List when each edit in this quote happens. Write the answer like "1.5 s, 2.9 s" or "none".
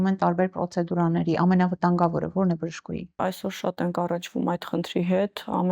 none